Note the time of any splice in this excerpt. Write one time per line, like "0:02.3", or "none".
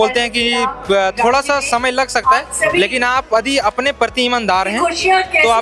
none

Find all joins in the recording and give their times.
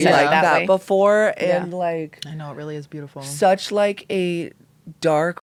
none

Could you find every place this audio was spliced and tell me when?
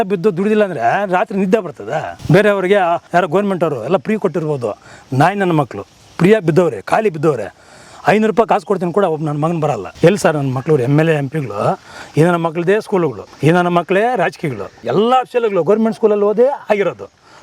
0:02.1
0:03.0
0:09.9
0:13.3
0:14.8

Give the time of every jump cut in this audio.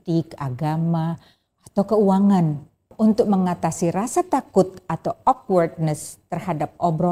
0:02.9

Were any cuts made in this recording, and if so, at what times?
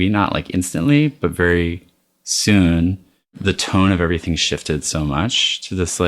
0:03.4

